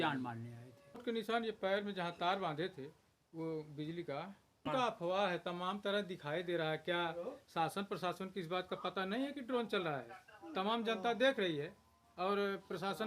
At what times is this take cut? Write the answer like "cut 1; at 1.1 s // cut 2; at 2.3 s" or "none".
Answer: cut 1; at 1.0 s // cut 2; at 4.6 s